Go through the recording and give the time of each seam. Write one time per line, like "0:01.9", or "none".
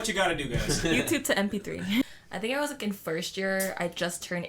0:02.0